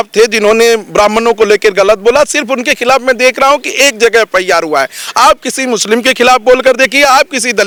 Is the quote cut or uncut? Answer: uncut